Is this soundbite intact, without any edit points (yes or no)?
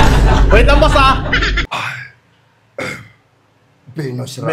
no